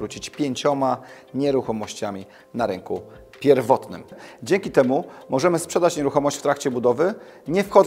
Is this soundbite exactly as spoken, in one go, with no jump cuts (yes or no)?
no